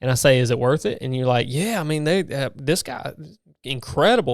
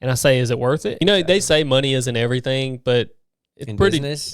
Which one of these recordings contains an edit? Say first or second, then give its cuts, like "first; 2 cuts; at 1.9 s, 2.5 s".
second; 1 cut; at 1.0 s